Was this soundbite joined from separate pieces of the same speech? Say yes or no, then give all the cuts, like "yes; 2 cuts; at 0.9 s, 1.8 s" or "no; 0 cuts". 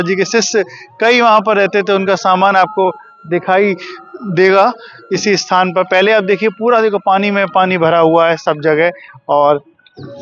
no; 0 cuts